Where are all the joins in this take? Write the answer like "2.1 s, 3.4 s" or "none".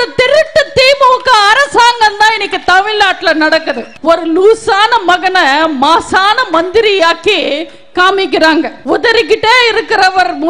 3.8 s, 8.8 s

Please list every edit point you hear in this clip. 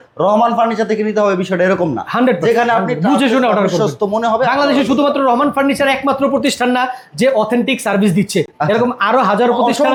none

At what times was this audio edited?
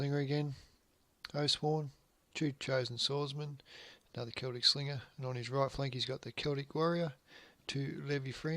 4.3 s

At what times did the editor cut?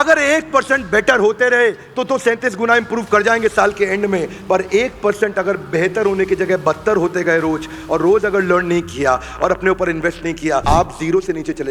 10.6 s

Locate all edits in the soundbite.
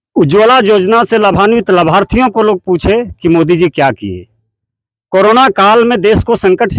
none

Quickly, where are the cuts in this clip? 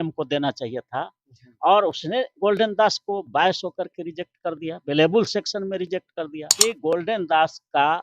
6.4 s

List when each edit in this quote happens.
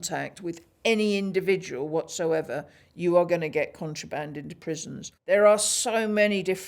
5.2 s

